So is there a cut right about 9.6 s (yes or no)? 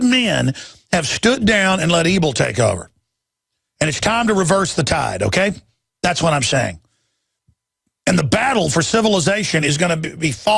no